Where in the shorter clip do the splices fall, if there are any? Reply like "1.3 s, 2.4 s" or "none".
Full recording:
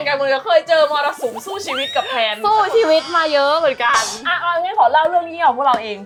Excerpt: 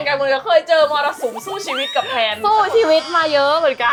none